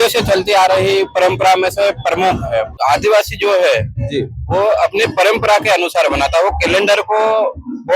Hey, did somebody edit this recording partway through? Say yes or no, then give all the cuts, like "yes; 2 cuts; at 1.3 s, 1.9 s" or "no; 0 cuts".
yes; 1 cut; at 2.7 s